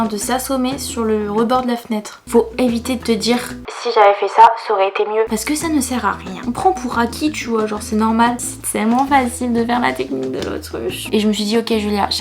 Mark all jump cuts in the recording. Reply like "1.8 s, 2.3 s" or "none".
2.2 s, 6.4 s, 8.4 s, 11.0 s